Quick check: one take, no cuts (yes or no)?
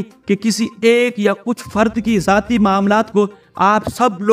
yes